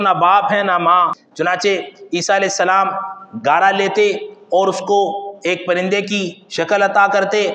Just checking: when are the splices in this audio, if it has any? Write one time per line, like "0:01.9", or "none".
0:01.2

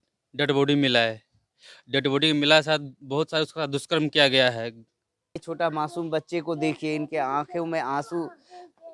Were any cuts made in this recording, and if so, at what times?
0:05.5

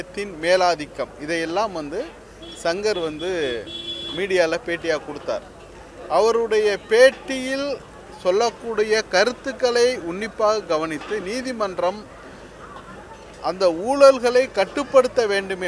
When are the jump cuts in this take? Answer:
none

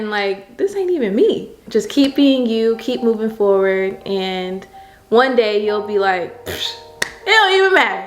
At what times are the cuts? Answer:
0:01.6

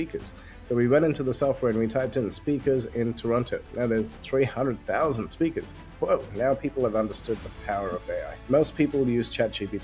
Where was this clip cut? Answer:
0:03.7
0:06.3
0:08.3

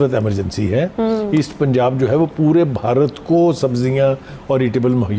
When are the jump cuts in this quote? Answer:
none

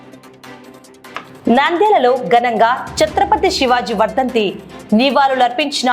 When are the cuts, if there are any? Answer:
0:01.1

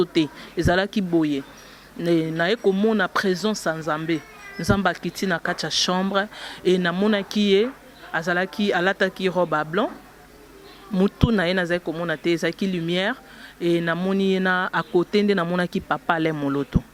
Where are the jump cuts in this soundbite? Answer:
none

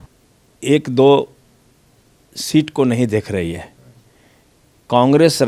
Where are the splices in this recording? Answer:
none

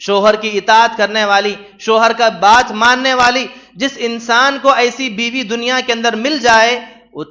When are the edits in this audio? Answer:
none

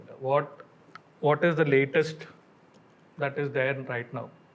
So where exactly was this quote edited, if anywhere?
none

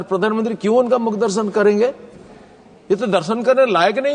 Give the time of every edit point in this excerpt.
none

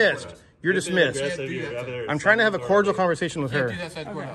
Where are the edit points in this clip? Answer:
none

